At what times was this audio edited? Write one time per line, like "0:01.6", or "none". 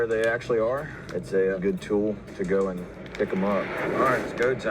0:01.6
0:03.8